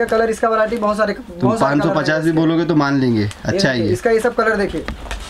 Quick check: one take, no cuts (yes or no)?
yes